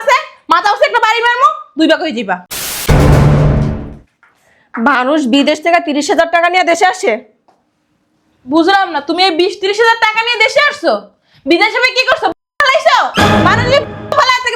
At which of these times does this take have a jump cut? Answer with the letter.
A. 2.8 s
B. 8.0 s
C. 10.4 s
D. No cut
A